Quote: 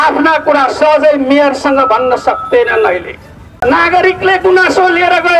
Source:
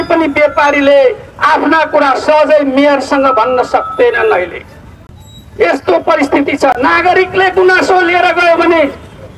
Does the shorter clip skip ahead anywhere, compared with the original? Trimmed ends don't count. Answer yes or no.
yes